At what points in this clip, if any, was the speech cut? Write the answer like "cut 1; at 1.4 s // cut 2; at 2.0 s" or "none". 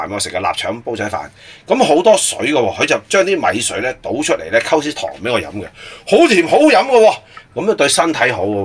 none